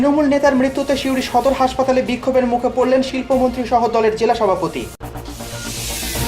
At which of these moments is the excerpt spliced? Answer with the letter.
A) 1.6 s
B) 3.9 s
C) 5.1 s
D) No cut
C